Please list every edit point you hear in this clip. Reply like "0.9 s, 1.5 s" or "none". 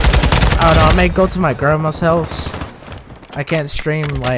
none